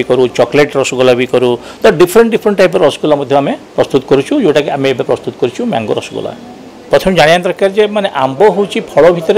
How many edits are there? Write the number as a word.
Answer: one